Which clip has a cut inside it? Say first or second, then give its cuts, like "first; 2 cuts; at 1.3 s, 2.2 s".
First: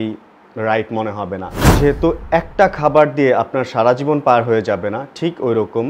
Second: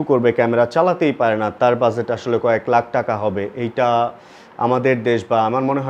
first; 1 cut; at 1.6 s